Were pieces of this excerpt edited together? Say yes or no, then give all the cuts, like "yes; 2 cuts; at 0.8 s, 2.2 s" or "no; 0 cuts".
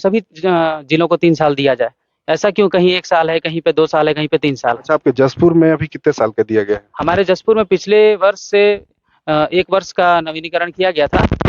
no; 0 cuts